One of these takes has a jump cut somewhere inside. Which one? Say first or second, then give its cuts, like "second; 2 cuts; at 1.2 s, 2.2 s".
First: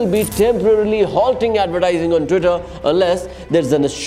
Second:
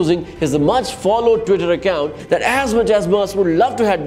second; 1 cut; at 2.2 s